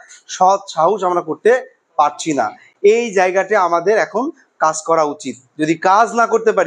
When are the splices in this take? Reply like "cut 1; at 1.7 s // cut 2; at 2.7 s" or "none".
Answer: none